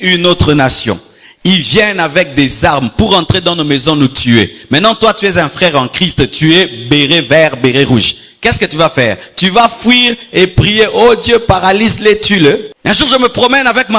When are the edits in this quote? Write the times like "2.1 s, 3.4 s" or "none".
12.7 s